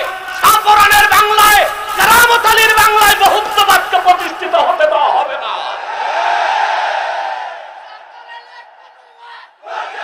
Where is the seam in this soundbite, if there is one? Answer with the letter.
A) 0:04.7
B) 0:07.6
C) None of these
C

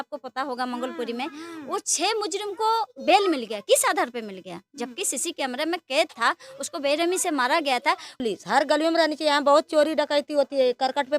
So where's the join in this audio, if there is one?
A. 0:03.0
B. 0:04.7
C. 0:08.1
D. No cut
C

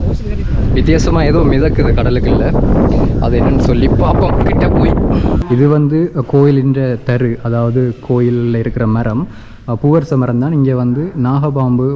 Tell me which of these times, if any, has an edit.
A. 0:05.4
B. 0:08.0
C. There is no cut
A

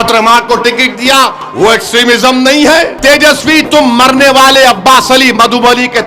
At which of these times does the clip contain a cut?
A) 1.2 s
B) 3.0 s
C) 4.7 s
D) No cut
B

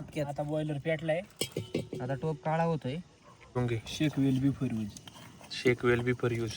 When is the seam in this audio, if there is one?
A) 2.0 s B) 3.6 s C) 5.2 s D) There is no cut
B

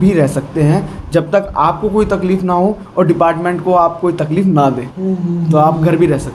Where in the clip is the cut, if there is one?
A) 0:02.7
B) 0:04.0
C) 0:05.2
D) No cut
D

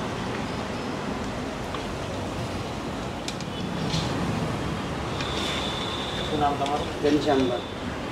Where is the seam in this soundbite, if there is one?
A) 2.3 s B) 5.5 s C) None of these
C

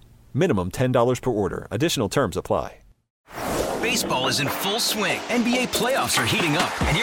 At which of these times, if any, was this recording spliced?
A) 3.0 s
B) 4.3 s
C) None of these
A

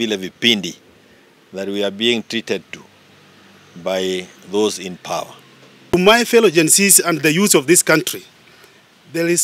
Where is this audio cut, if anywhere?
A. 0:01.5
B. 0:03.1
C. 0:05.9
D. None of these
C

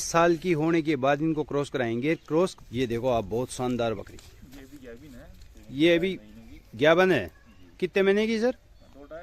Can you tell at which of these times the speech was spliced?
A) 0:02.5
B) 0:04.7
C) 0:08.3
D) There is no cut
A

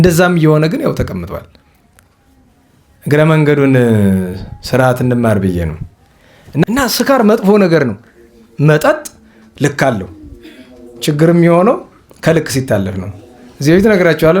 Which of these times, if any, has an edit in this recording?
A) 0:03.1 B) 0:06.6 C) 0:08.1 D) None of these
B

